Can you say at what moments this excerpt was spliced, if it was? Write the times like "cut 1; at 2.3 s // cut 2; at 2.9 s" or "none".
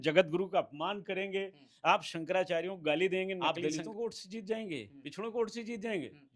cut 1; at 3.4 s